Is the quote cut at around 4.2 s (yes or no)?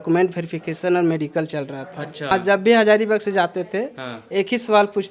no